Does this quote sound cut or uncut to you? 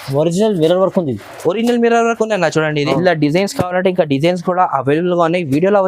cut